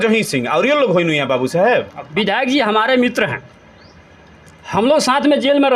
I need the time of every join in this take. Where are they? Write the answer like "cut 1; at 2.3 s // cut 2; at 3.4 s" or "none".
cut 1; at 2.0 s